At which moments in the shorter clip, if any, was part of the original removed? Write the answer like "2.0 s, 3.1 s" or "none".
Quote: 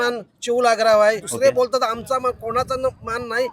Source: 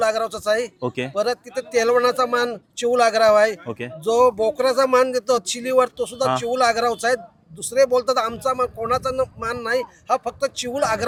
1.3 s

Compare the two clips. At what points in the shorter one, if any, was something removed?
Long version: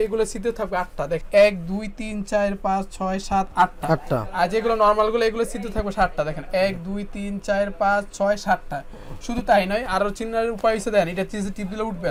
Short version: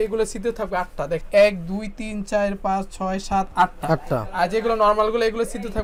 none

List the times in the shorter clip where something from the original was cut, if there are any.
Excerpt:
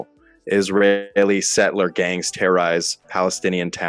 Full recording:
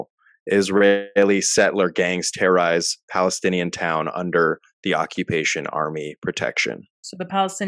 none

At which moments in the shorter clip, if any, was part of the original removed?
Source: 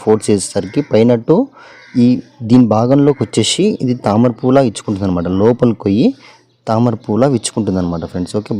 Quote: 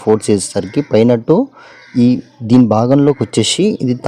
none

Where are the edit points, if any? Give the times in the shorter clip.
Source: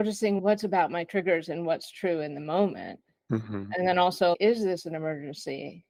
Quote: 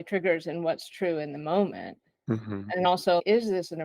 2.8 s

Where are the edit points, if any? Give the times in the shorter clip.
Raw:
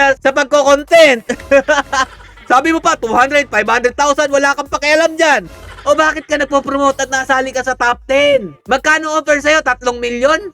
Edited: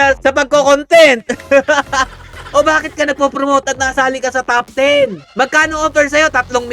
2.3 s

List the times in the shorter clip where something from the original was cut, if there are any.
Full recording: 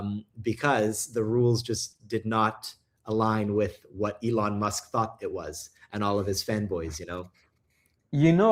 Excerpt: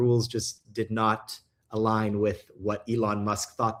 none

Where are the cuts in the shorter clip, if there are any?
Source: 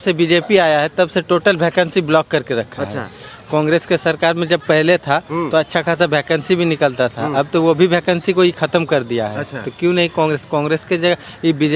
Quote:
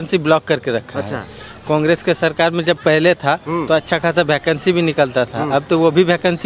none

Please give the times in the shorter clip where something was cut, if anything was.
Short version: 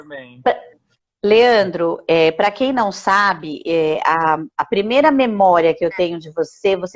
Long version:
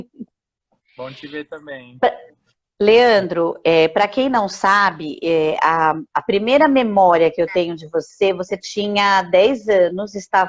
none

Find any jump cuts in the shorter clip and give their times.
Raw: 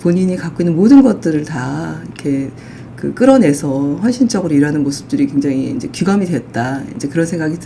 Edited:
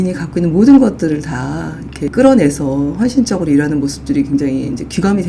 2.0 s

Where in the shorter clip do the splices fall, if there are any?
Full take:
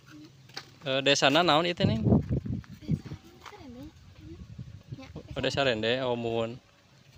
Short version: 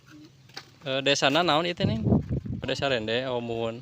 2.5 s

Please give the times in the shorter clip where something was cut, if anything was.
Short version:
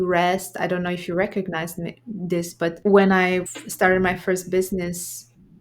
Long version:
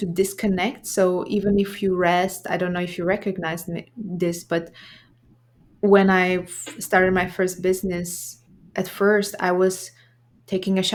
2.8 s, 3.6 s

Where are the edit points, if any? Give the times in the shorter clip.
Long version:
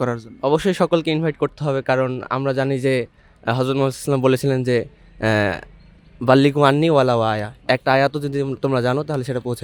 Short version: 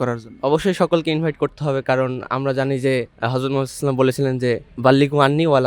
3.2 s, 4.7 s

